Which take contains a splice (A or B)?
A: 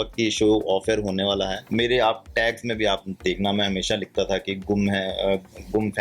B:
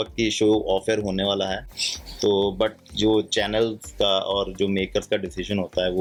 A